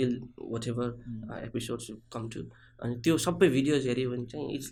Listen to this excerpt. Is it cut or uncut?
uncut